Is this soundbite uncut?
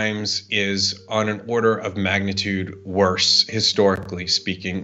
yes; 0 cuts

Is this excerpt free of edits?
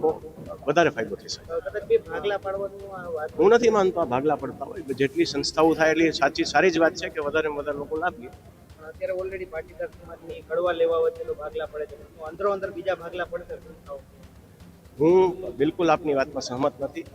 yes; 0 cuts

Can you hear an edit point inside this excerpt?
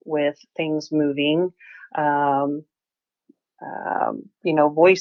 no; 0 cuts

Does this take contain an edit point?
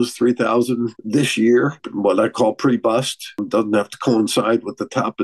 yes; 3 cuts; at 1.0 s, 1.8 s, 3.5 s

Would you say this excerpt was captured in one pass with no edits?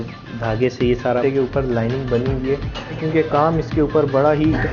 no; 2 cuts; at 1.2 s, 3.0 s

